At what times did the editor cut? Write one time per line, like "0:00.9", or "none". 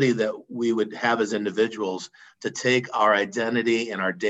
none